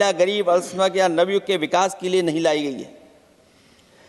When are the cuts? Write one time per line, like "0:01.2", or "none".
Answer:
none